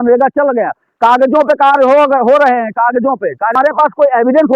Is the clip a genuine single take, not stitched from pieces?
no; 1 cut; at 3.5 s

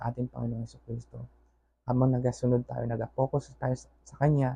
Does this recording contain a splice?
no; 0 cuts

